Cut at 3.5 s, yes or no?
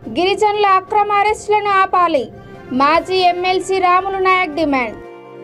no